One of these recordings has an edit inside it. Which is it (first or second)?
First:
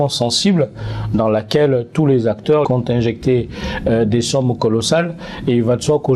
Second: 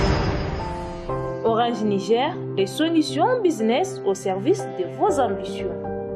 first